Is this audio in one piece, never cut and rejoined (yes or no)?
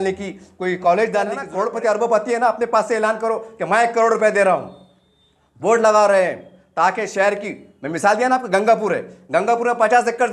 no